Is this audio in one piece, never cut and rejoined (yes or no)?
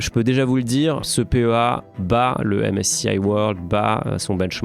no